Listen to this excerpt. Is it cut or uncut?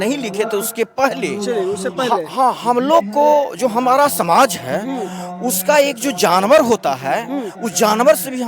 uncut